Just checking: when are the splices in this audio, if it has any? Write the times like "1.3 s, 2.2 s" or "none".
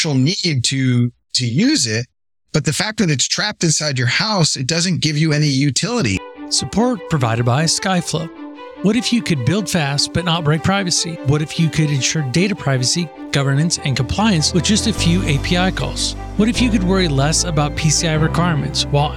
6.1 s